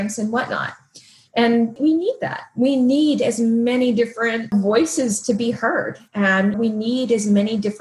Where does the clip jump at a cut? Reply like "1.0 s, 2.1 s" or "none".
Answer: 1.7 s, 4.5 s, 6.5 s